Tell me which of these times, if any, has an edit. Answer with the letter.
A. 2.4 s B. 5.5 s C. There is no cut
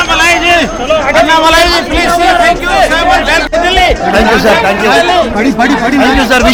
C